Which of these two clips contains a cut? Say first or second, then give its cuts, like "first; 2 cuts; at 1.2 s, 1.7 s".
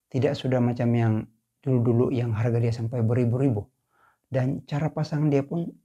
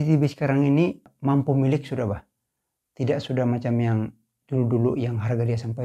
second; 1 cut; at 1.1 s